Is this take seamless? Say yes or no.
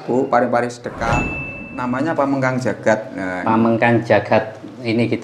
no